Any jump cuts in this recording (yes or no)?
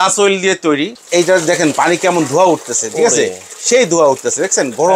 yes